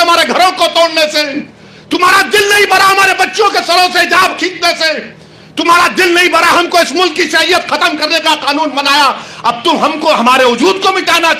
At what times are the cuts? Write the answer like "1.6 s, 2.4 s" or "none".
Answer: none